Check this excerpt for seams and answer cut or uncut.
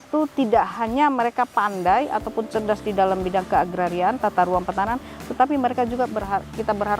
uncut